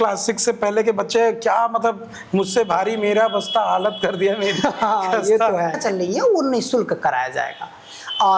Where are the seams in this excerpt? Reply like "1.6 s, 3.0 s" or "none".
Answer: 5.8 s